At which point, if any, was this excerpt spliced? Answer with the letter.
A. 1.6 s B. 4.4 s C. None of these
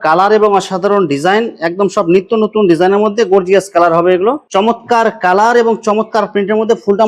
B